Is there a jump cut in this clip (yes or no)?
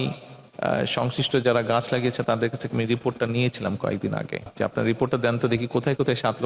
yes